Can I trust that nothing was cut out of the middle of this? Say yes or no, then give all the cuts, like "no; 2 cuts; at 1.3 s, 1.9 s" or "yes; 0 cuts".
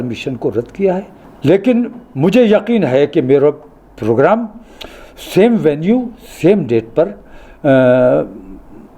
no; 1 cut; at 1.2 s